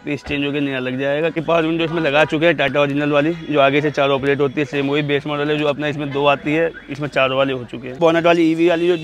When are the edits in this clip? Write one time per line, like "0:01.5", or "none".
0:01.3
0:08.0